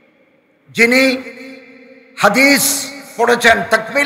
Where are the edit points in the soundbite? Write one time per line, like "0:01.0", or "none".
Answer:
none